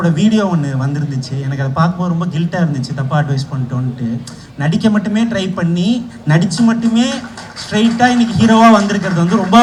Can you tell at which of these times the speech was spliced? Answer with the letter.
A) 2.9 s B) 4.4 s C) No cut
C